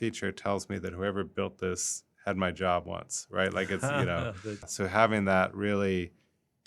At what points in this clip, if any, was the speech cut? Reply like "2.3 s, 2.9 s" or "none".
4.7 s